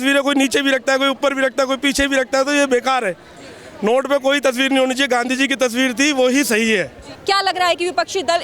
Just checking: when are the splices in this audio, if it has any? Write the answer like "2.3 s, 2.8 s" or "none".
7.1 s